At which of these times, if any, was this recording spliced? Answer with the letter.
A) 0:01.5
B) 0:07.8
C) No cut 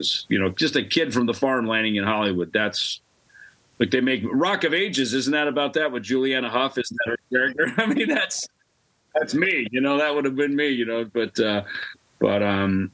C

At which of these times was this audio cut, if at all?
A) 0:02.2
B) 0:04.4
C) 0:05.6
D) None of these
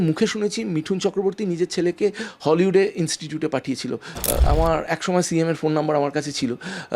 B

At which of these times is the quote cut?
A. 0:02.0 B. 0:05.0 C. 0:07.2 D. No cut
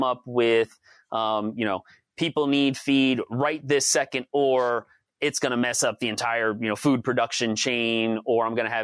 D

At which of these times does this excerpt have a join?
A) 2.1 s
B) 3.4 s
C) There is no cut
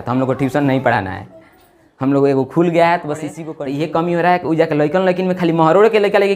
B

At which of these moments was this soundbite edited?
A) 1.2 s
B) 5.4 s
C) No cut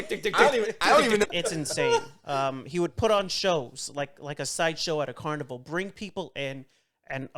A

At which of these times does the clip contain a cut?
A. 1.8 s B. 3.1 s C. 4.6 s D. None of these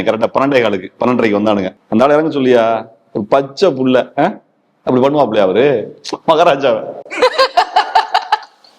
A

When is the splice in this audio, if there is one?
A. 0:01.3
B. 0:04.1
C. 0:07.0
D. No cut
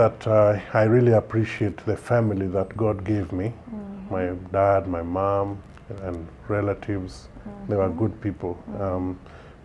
D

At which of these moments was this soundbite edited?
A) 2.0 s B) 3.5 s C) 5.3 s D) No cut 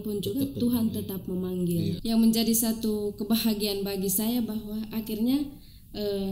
A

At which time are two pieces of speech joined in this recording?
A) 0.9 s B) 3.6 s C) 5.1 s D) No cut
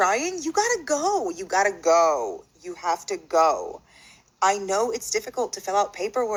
D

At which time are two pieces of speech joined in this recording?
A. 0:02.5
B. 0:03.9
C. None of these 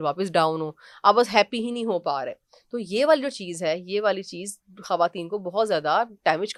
C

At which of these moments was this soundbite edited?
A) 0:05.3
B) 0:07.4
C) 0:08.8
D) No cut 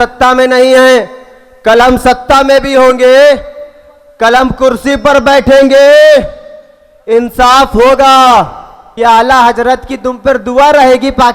C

